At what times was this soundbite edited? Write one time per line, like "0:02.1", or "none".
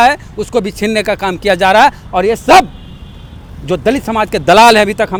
none